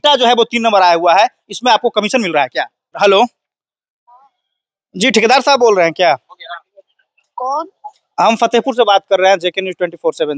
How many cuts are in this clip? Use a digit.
1